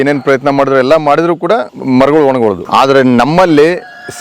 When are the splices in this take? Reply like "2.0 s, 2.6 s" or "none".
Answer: 1.7 s, 2.6 s